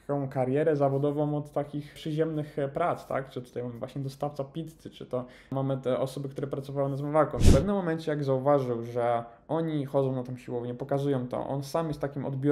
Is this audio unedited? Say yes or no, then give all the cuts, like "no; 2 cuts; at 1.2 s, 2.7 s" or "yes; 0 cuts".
no; 2 cuts; at 5.5 s, 7.4 s